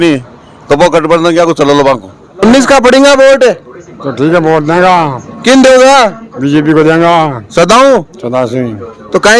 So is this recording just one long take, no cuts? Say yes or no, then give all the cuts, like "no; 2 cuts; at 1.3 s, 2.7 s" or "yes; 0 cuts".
yes; 0 cuts